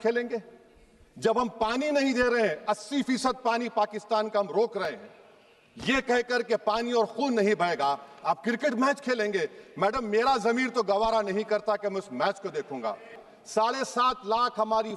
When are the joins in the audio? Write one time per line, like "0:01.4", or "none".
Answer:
0:13.3